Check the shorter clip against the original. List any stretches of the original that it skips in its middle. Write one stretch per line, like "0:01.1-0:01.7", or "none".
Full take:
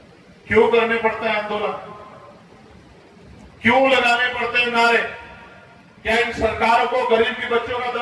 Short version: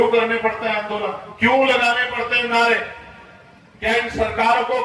0:01.8-0:03.5